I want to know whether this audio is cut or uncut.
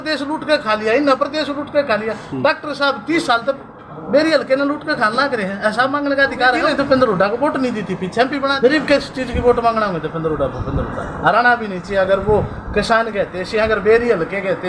cut